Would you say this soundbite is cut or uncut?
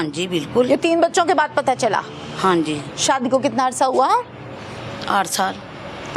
uncut